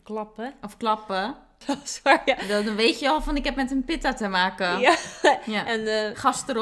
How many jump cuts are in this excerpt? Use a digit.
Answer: 1